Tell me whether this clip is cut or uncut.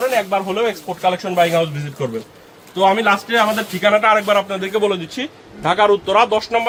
uncut